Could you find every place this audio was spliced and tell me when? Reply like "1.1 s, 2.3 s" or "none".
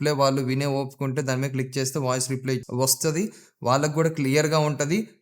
2.6 s